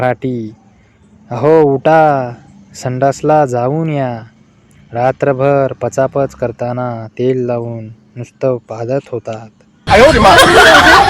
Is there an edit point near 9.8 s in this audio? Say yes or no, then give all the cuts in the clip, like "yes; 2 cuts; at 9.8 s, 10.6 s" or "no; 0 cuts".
yes; 1 cut; at 9.8 s